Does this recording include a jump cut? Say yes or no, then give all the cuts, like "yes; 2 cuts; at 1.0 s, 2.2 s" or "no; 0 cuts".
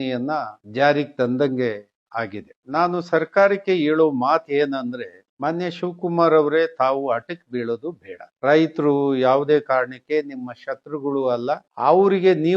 yes; 2 cuts; at 2.6 s, 8.4 s